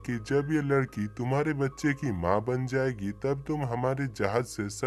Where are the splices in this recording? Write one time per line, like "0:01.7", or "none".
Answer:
none